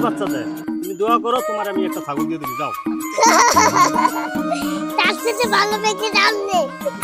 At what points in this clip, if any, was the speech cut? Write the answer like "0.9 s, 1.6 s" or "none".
none